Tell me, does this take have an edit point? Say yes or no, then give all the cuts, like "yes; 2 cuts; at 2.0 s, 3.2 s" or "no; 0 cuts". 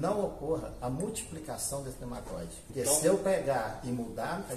yes; 1 cut; at 2.7 s